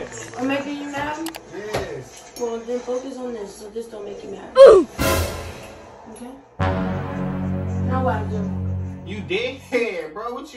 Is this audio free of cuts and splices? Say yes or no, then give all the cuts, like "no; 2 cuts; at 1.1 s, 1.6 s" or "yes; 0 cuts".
yes; 0 cuts